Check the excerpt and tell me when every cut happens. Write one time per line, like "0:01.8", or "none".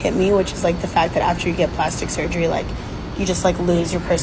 none